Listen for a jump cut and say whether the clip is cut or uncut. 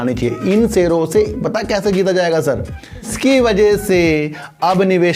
cut